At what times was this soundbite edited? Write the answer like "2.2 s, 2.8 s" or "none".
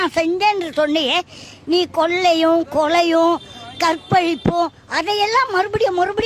none